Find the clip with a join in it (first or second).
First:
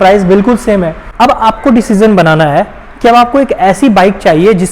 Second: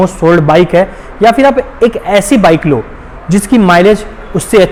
first